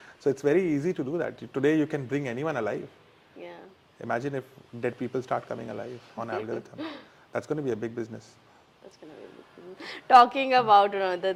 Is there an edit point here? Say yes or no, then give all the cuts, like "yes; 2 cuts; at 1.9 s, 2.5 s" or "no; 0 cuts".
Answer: no; 0 cuts